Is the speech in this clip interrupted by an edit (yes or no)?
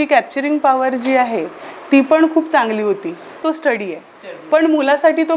yes